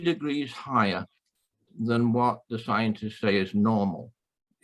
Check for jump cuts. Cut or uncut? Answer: uncut